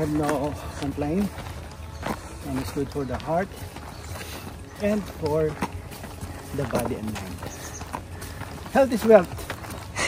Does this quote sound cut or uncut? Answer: uncut